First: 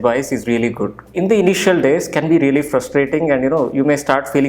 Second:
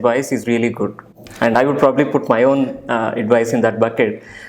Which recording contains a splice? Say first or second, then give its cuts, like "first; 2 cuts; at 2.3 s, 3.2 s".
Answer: first; 1 cut; at 1.1 s